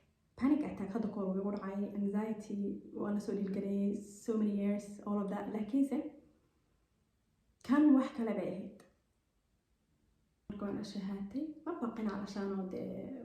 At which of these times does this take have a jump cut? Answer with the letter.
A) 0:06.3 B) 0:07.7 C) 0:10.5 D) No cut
C